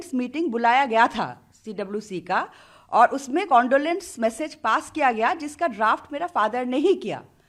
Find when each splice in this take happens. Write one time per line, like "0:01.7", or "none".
none